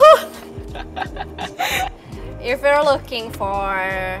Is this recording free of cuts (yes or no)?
yes